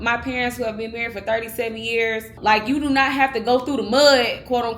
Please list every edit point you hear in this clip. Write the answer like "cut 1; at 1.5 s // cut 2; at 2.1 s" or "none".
cut 1; at 2.3 s